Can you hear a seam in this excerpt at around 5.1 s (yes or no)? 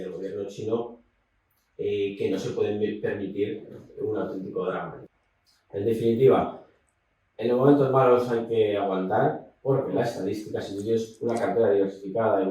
yes